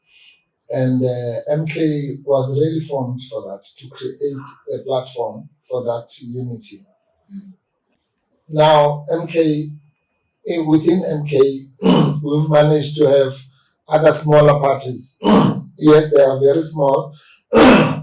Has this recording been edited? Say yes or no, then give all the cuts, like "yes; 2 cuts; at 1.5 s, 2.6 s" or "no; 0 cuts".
yes; 1 cut; at 7.8 s